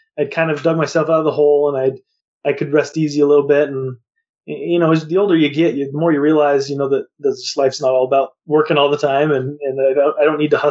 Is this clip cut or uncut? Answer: uncut